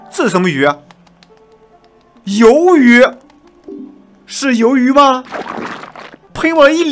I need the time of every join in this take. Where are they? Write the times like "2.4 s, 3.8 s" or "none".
none